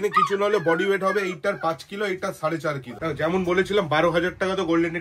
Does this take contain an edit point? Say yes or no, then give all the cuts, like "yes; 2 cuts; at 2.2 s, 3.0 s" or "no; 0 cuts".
yes; 1 cut; at 2.9 s